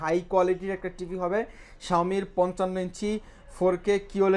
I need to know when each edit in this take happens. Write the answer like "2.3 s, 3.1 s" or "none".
none

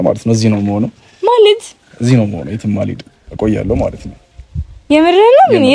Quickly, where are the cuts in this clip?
none

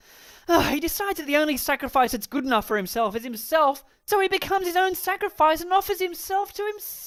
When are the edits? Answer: none

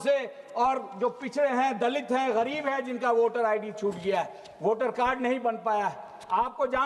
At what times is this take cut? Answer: none

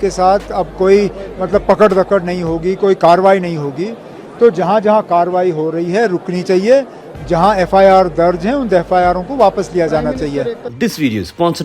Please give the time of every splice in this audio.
10.7 s

